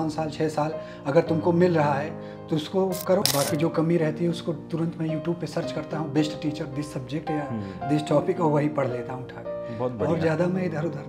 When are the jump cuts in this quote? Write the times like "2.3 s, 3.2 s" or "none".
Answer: 3.2 s